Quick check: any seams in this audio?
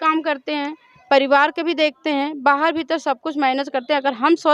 no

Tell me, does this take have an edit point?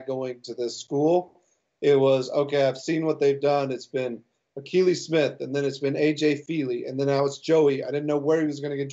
no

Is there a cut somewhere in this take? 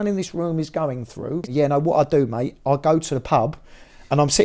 yes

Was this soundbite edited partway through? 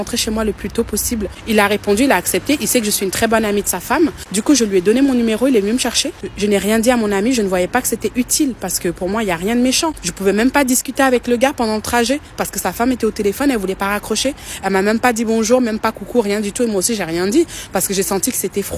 yes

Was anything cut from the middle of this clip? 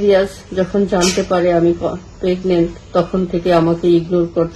no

